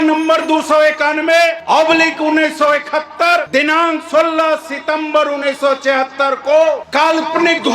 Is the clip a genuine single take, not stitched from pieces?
no; 3 cuts; at 1.6 s, 3.5 s, 6.8 s

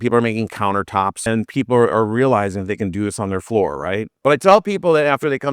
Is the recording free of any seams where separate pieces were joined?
no; 2 cuts; at 1.2 s, 4.1 s

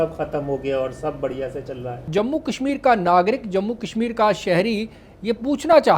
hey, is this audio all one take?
no; 1 cut; at 2.0 s

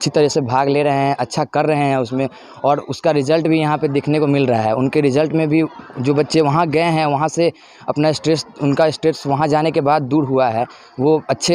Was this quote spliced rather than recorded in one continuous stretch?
no; 0 cuts

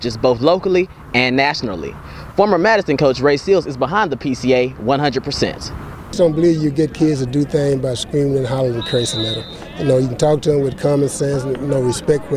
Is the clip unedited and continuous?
yes; 0 cuts

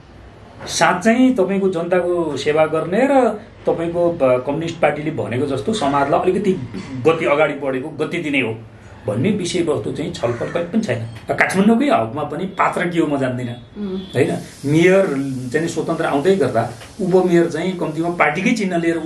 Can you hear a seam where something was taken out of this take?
yes; 1 cut; at 11.1 s

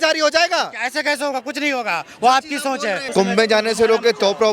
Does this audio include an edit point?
no; 0 cuts

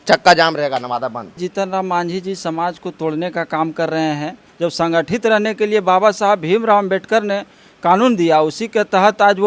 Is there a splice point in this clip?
yes; 2 cuts; at 1.4 s, 4.4 s

